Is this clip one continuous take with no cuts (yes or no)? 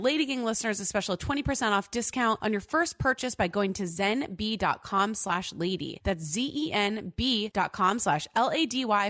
no